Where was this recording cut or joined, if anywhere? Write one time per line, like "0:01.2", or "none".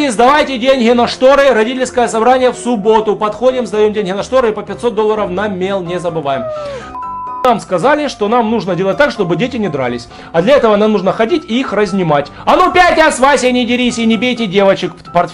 0:06.9